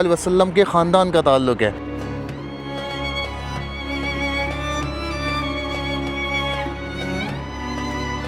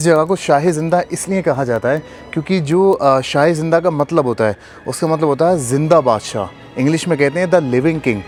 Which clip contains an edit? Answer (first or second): first